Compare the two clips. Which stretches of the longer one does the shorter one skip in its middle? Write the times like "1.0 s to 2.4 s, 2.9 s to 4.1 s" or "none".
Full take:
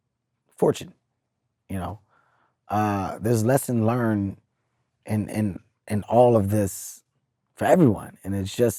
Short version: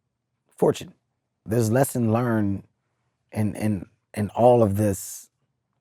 1.4 s to 3.1 s